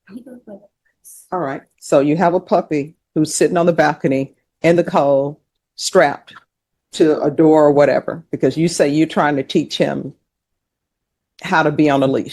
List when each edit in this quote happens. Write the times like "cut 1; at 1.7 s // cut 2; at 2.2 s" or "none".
none